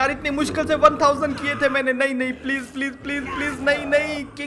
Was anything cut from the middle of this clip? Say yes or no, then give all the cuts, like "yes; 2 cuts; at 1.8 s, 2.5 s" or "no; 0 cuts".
no; 0 cuts